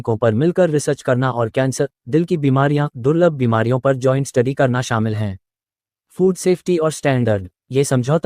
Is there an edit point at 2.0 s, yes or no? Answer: no